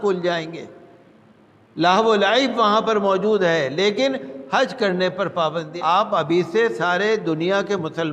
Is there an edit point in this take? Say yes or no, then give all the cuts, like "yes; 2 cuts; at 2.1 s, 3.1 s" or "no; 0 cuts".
yes; 1 cut; at 5.7 s